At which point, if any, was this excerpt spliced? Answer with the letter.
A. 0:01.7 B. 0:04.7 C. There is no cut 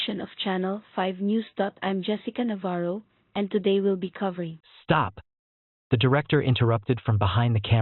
B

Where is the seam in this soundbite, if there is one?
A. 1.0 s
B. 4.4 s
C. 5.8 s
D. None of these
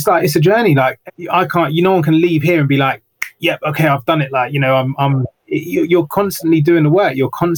A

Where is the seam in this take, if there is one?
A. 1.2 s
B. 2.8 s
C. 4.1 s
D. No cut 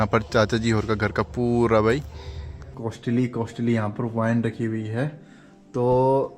B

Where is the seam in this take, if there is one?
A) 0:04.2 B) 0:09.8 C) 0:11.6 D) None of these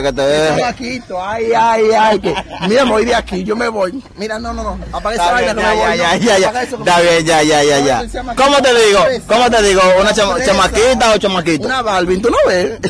D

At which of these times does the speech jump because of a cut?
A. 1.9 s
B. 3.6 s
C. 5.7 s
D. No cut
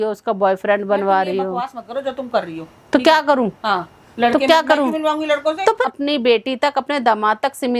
C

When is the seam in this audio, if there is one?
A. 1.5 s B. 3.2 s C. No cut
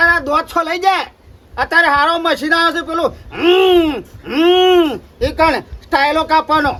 C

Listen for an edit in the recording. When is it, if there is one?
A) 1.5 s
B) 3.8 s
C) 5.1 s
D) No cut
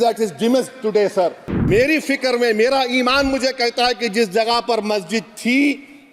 A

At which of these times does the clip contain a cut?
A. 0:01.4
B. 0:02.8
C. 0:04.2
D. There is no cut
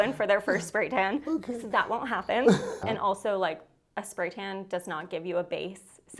B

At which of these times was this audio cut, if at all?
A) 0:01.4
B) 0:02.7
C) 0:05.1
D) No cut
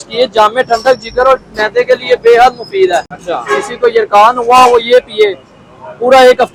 D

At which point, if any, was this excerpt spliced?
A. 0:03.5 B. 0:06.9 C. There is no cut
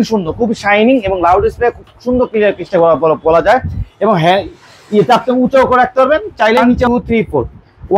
B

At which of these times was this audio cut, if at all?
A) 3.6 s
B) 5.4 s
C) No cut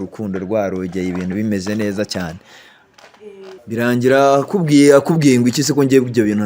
A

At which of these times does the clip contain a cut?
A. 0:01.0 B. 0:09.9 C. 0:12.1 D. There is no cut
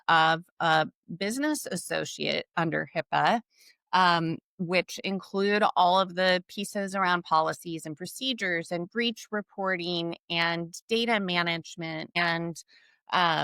C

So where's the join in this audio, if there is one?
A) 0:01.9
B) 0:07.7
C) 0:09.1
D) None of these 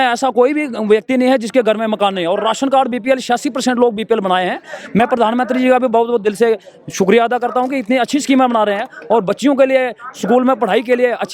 D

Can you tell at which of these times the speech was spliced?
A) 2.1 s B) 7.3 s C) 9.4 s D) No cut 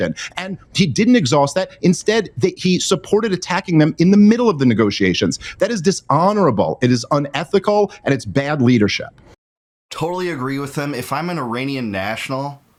D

